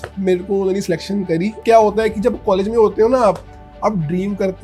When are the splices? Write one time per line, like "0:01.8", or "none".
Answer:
none